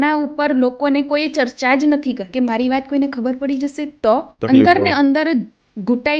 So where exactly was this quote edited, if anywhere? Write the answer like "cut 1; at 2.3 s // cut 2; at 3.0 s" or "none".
cut 1; at 2.2 s // cut 2; at 4.3 s